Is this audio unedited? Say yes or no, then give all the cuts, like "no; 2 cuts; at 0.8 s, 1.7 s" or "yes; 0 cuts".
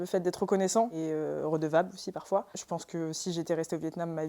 no; 1 cut; at 0.9 s